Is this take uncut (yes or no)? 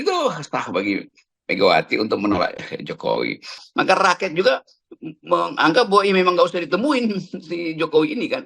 no